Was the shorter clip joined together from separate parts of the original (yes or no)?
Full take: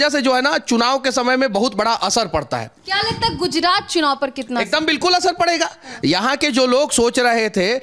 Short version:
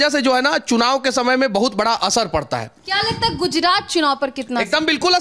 no